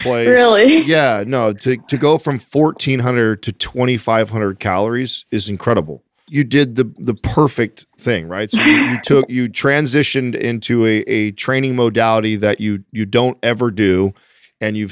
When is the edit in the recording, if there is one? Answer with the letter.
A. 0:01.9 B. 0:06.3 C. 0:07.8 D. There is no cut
B